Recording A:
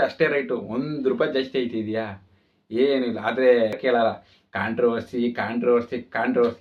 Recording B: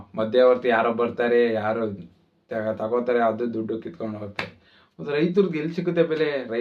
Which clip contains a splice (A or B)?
A